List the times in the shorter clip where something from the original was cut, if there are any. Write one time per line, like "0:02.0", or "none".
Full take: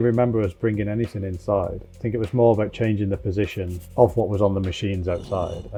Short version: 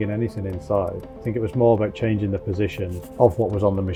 none